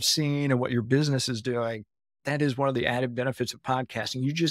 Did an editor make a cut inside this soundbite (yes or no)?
yes